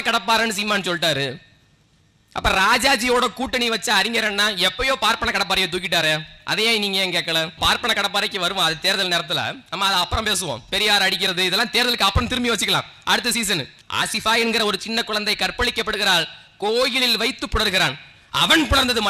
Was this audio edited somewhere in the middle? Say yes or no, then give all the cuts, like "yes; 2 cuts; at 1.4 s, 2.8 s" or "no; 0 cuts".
yes; 2 cuts; at 7.6 s, 13.8 s